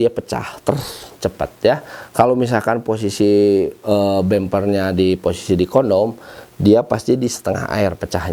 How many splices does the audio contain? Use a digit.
0